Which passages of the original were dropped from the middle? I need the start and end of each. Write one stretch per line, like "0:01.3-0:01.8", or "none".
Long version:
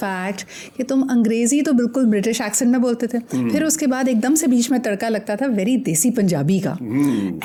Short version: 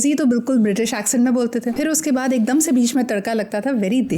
0:03.3-0:03.5